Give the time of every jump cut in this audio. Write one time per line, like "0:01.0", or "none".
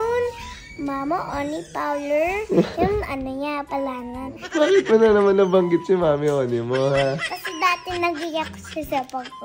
0:04.4
0:07.2